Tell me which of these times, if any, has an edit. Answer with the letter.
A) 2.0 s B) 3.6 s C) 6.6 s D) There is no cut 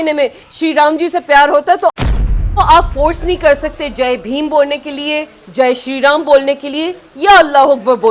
A